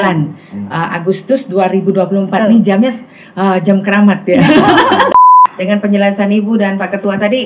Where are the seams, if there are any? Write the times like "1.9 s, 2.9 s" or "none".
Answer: 5.3 s